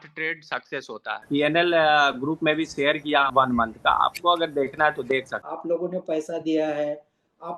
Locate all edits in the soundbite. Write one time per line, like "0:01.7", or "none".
0:01.2
0:03.3
0:05.4